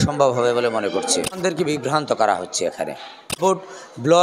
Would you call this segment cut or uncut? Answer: cut